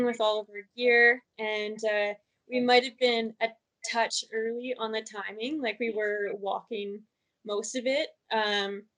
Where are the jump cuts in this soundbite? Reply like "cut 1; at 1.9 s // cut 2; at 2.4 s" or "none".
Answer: none